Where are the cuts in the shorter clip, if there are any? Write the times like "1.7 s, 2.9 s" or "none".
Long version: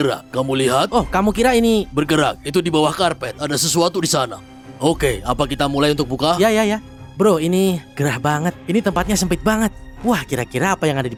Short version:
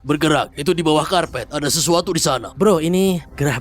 2.5 s